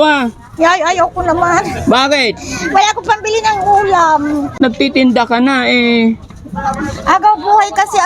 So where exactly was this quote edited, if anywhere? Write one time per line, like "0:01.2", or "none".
0:04.6